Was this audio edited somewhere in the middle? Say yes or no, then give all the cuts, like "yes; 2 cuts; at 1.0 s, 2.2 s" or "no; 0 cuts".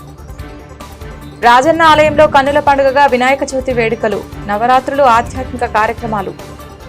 no; 0 cuts